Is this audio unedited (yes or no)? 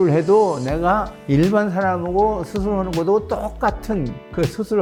yes